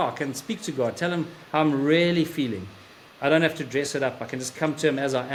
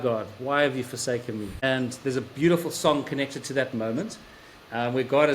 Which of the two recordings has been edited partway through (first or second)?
second